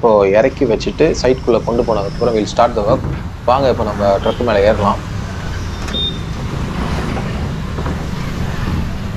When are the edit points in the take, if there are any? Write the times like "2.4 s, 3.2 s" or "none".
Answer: none

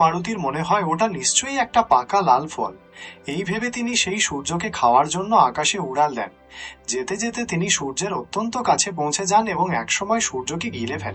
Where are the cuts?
none

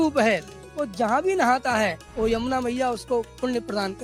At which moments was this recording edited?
2.0 s

